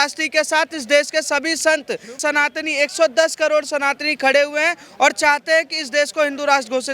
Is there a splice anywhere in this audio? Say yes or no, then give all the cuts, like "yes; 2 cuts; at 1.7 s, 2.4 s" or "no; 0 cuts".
yes; 1 cut; at 2.2 s